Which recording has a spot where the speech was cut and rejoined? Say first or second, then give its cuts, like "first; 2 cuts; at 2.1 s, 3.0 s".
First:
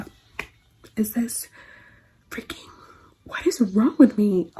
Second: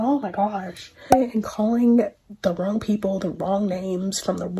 second; 1 cut; at 1.0 s